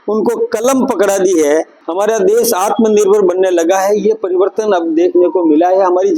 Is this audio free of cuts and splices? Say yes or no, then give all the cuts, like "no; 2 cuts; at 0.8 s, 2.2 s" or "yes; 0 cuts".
no; 1 cut; at 1.8 s